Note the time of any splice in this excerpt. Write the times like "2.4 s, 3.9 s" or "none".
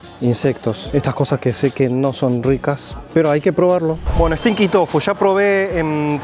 4.1 s